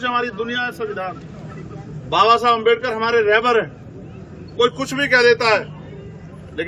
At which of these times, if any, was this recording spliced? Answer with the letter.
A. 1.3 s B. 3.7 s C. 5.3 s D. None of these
D